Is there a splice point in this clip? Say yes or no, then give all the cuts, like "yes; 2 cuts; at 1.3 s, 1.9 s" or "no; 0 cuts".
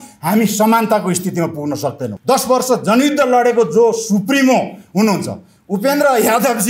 yes; 1 cut; at 2.1 s